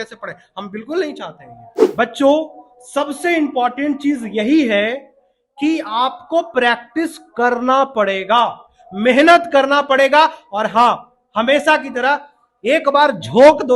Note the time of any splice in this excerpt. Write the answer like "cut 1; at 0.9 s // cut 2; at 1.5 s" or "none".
cut 1; at 1.7 s